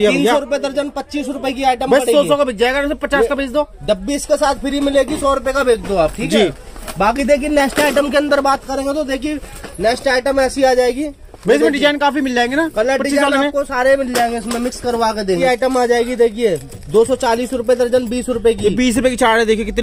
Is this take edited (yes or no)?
no